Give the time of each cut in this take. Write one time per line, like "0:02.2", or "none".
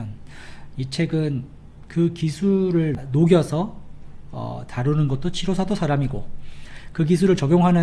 0:03.0